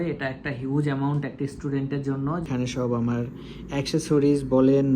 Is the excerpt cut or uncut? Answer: cut